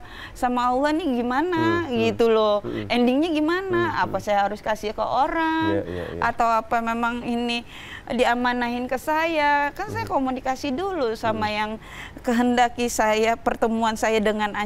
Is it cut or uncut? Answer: uncut